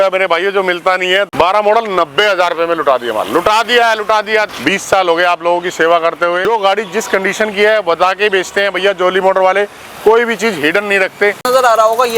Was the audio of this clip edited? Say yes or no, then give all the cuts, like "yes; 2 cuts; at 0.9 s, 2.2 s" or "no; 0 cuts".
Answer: yes; 4 cuts; at 1.3 s, 4.5 s, 6.4 s, 11.4 s